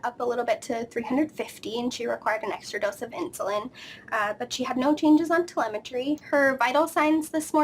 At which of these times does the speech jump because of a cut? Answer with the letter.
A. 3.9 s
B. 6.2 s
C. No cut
B